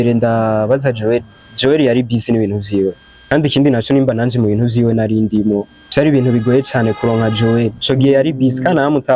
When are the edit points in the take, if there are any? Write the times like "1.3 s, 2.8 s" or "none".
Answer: 3.1 s, 5.8 s